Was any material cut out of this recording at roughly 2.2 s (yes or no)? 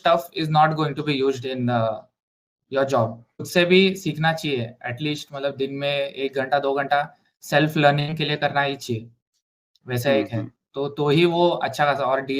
no